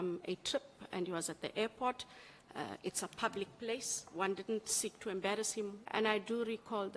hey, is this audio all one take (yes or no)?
no